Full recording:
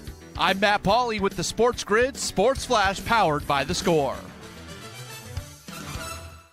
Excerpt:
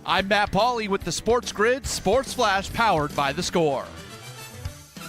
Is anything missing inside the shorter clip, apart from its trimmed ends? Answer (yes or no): yes